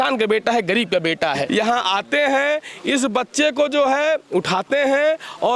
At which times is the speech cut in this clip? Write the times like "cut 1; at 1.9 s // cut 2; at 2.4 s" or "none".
cut 1; at 1.4 s